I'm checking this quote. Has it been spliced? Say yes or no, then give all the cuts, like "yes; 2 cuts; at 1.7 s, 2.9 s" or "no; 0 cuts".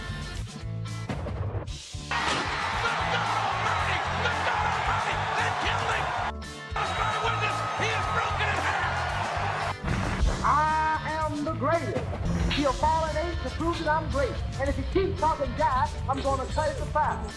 no; 0 cuts